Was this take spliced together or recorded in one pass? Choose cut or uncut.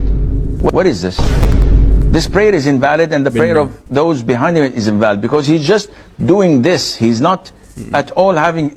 uncut